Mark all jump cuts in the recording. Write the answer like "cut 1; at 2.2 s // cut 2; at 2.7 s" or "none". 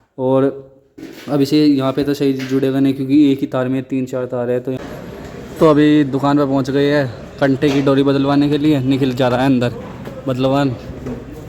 cut 1; at 4.8 s